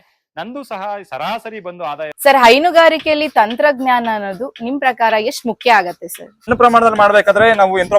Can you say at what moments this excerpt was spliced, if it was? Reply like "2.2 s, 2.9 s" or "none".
2.1 s, 6.5 s